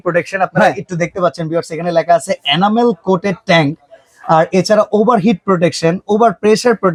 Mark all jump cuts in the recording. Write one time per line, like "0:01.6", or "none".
none